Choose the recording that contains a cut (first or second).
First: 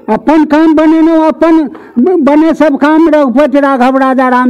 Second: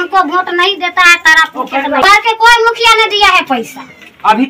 second